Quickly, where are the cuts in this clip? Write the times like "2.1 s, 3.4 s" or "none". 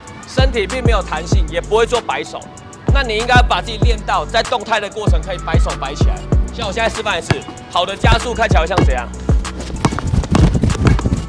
none